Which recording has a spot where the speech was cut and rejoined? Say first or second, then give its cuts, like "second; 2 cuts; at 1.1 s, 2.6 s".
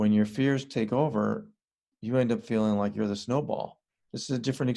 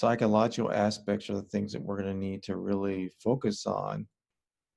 first; 1 cut; at 3.8 s